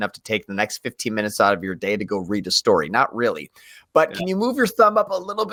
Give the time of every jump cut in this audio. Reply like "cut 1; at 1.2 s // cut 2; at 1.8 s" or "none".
none